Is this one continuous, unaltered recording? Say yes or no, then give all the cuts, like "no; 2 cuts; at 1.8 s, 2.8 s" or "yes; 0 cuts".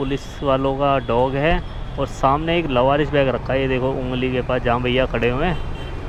yes; 0 cuts